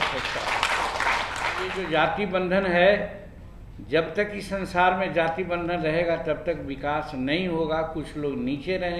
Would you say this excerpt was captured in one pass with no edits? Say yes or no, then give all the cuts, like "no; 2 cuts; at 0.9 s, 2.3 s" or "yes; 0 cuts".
no; 1 cut; at 1.8 s